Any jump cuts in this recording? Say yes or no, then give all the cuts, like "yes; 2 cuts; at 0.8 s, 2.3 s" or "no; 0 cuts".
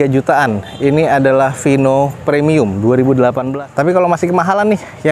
yes; 1 cut; at 3.5 s